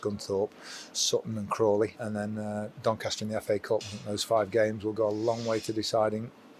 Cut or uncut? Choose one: cut